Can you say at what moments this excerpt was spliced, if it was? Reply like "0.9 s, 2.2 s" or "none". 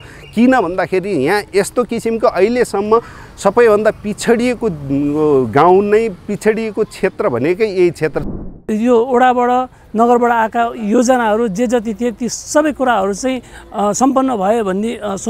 8.5 s